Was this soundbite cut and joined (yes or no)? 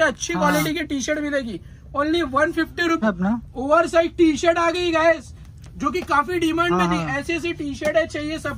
yes